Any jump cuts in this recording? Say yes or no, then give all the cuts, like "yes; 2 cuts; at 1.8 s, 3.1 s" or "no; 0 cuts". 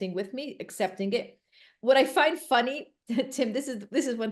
no; 0 cuts